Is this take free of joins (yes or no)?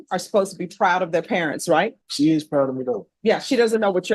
no